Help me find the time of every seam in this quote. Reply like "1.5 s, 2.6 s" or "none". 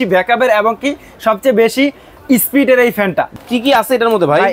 3.3 s